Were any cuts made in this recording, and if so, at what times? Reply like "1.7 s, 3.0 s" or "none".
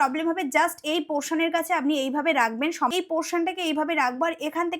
2.9 s